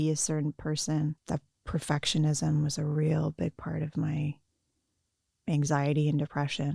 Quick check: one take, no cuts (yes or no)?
no